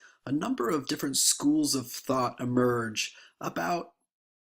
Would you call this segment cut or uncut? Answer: uncut